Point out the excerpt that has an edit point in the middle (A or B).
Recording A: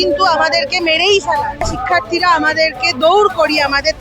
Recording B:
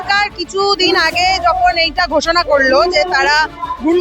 A